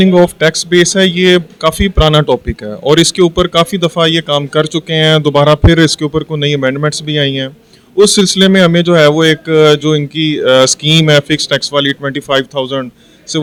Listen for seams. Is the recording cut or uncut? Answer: uncut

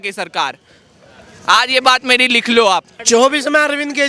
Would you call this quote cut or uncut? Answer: cut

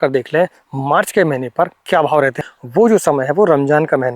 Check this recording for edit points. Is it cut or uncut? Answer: cut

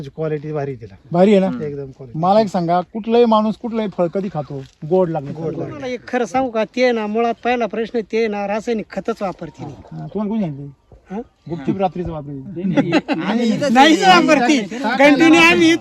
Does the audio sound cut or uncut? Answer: cut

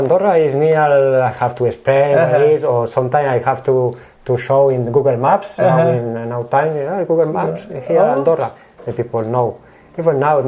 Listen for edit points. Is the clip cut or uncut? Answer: uncut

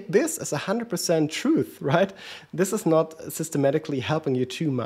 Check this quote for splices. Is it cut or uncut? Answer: uncut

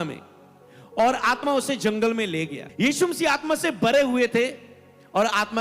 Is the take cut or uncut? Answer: cut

